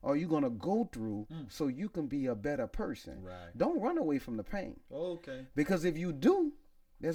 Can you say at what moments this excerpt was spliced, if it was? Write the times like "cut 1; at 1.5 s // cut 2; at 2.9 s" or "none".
none

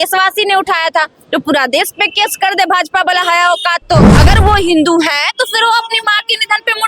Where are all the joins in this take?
cut 1; at 4.1 s

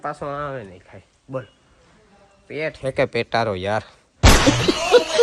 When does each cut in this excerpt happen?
cut 1; at 1.6 s // cut 2; at 4.0 s

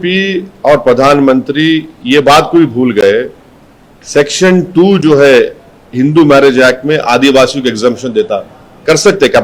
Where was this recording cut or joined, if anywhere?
none

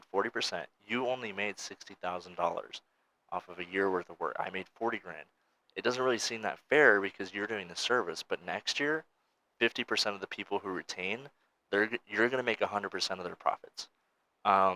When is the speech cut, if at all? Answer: none

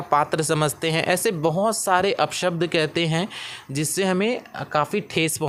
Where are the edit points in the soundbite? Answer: none

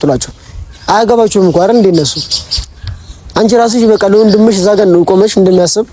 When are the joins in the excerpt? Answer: none

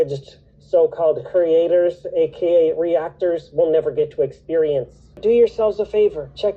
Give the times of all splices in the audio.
cut 1; at 5.2 s

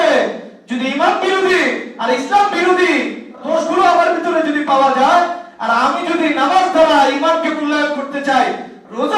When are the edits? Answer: cut 1; at 3.4 s

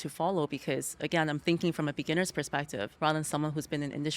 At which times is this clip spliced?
cut 1; at 2.9 s

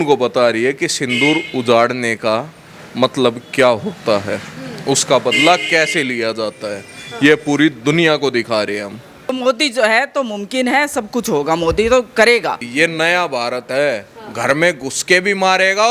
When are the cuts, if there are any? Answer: cut 1; at 9.4 s // cut 2; at 12.7 s

